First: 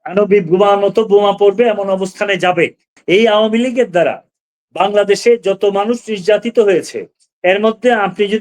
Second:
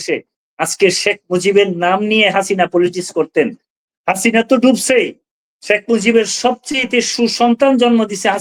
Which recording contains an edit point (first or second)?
first